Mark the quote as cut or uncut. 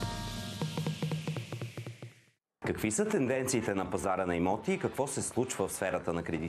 cut